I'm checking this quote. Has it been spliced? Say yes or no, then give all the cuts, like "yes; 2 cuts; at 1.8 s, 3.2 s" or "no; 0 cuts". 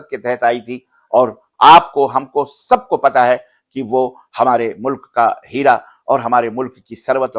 no; 0 cuts